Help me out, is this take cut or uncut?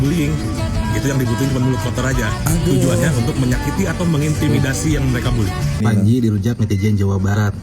cut